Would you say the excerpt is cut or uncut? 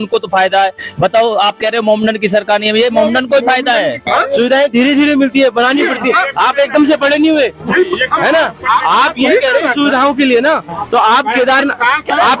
cut